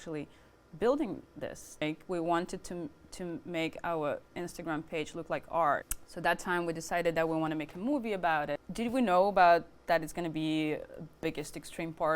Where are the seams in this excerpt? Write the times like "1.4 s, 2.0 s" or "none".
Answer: 1.8 s, 5.9 s, 8.7 s